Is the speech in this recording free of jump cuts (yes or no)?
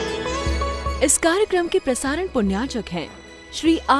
no